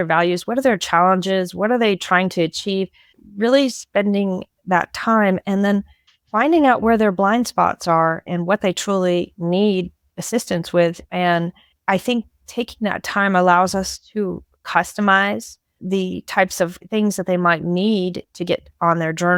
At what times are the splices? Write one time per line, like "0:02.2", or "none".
none

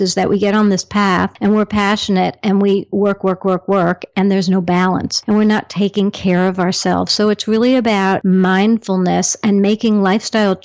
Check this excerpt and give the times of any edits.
0:01.3
0:05.1
0:08.2

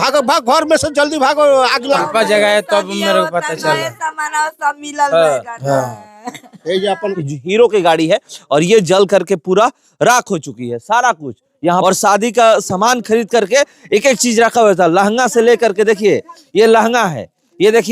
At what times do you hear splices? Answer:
0:02.0
0:07.2
0:11.8

